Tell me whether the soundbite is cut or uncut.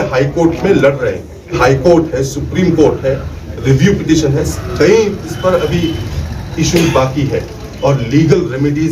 cut